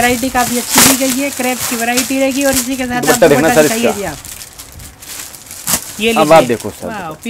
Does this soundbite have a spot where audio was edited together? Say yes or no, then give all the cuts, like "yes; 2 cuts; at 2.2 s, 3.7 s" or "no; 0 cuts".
no; 0 cuts